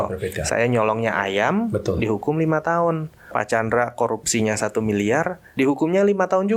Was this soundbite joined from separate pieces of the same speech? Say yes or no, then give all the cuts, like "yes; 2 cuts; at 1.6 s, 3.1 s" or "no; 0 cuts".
yes; 2 cuts; at 3.2 s, 5.4 s